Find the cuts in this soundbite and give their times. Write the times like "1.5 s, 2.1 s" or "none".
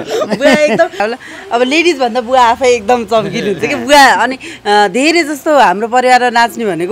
1.0 s